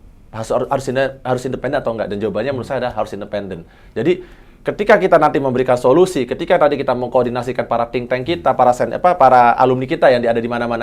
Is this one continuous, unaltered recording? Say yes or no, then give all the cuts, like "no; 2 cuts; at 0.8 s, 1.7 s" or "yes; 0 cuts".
yes; 0 cuts